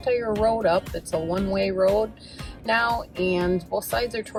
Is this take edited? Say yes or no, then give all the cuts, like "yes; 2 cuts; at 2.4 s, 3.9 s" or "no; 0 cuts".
no; 0 cuts